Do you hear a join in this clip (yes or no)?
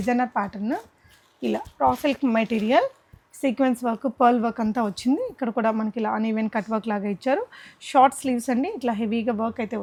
no